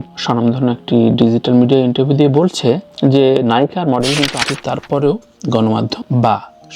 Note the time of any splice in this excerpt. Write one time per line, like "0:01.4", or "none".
0:04.4